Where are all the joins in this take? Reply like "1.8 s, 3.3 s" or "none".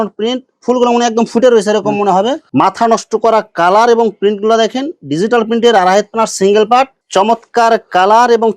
2.4 s, 7.0 s